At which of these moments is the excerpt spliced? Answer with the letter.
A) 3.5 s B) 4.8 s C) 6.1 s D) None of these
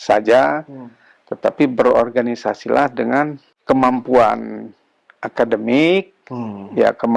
A